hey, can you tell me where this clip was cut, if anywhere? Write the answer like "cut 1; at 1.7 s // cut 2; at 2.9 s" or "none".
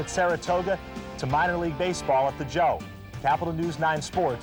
none